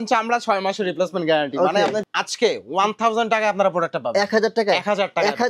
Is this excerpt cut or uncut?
cut